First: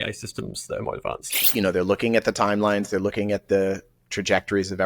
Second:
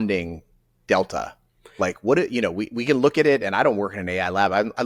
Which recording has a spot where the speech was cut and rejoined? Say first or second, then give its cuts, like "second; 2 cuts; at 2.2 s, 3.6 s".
first; 1 cut; at 1.5 s